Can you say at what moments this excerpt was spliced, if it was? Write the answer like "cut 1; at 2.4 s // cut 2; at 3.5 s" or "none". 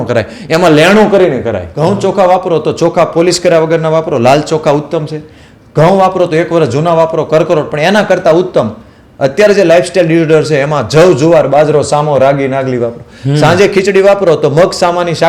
cut 1; at 1.7 s